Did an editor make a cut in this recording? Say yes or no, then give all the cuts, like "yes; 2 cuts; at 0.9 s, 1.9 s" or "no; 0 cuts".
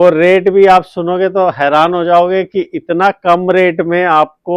no; 0 cuts